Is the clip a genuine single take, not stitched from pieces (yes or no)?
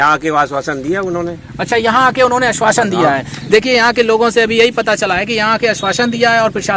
yes